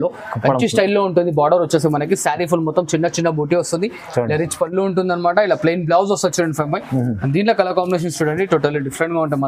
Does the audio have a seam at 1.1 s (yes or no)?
no